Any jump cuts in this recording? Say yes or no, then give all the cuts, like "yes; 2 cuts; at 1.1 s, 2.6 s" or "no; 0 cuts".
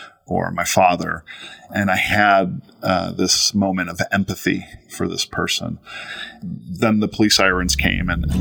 yes; 2 cuts; at 1.6 s, 6.3 s